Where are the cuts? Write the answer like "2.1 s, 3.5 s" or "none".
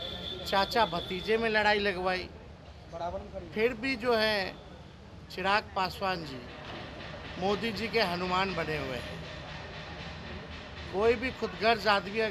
none